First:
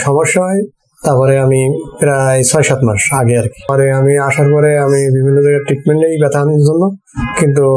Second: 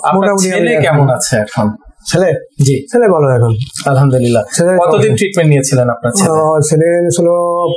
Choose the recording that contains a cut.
first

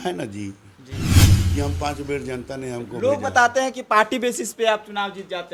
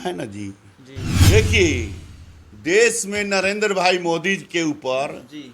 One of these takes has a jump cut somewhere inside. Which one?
second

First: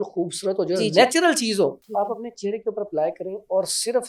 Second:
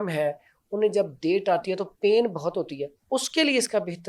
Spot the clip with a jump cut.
first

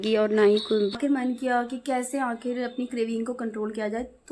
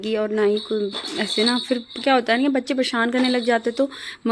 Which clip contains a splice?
first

